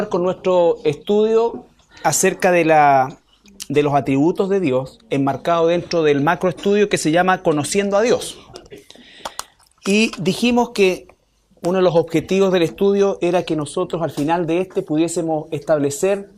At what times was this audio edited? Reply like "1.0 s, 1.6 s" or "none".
none